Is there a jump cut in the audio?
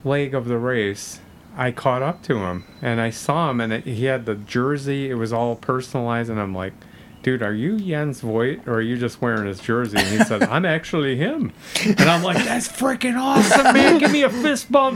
no; 0 cuts

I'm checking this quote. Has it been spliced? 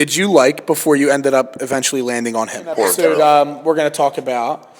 yes; 1 cut; at 2.9 s

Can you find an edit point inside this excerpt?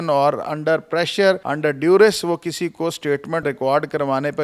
yes; 2 cuts; at 1.5 s, 3.4 s

